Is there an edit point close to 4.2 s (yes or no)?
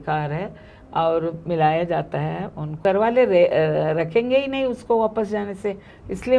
no